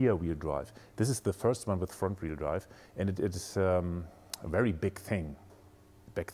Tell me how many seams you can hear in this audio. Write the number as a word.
zero